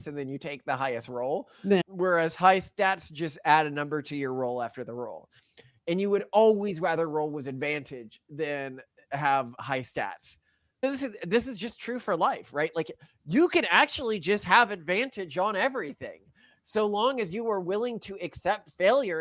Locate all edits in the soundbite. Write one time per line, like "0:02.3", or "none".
none